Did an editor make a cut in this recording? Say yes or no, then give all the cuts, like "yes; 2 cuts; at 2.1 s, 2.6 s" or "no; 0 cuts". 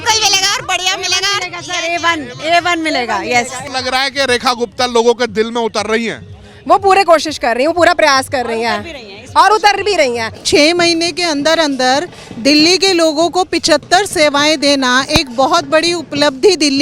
yes; 2 cuts; at 3.6 s, 10.3 s